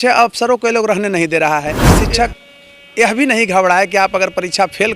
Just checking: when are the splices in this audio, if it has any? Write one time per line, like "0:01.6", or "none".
0:01.9